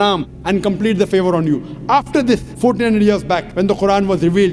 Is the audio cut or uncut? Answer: cut